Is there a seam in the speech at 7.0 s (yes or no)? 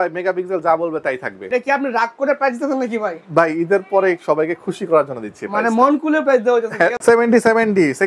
yes